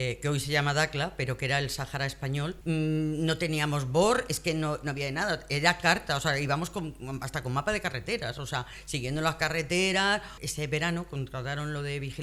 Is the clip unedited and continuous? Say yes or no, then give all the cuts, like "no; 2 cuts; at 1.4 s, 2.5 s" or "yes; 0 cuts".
no; 2 cuts; at 2.6 s, 10.3 s